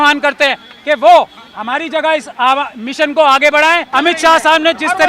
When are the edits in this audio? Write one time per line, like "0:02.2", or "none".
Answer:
0:03.9